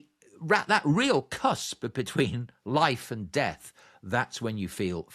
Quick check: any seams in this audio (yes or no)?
no